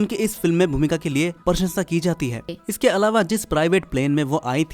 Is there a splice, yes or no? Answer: yes